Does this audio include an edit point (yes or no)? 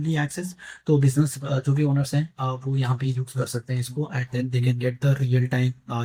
no